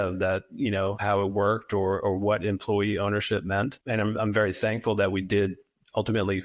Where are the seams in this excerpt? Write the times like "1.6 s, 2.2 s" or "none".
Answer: 1.0 s, 3.8 s